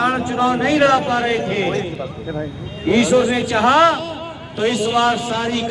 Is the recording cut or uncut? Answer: uncut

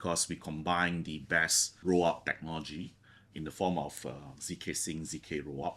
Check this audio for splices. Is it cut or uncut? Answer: cut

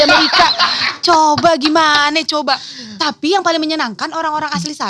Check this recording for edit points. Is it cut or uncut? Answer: uncut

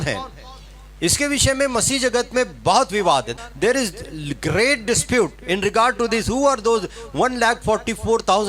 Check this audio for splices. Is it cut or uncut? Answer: cut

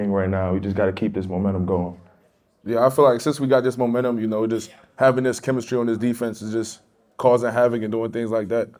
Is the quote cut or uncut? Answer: uncut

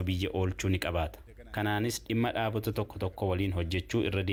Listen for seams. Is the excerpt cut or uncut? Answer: uncut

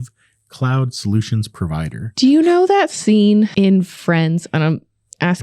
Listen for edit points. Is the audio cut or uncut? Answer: cut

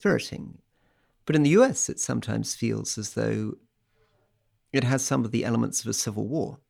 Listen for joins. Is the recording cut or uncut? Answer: cut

